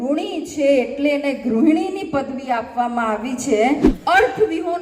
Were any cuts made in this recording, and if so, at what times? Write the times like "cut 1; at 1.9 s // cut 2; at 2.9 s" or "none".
cut 1; at 3.9 s